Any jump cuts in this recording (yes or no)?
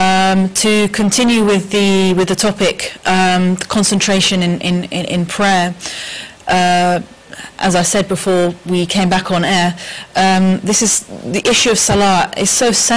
no